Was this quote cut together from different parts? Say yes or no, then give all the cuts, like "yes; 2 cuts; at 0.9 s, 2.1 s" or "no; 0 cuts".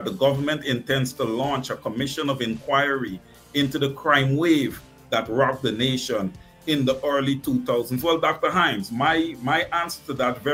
no; 0 cuts